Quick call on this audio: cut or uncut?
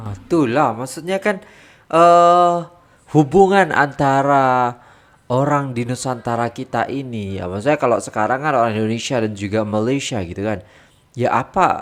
uncut